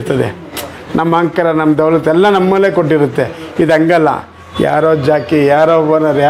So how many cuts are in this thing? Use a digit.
0